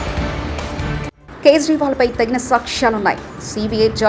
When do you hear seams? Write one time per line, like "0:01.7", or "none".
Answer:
none